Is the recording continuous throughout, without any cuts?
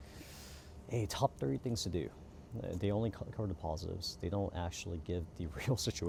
yes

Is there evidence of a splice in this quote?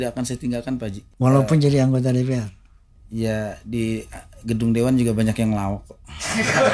yes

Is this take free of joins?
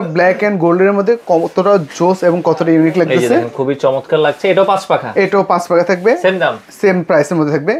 yes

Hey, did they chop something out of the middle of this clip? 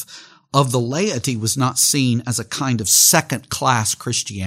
no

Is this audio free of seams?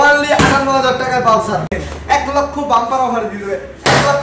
no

